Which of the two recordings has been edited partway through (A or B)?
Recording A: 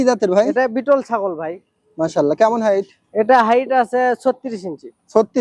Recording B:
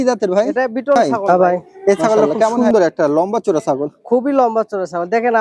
B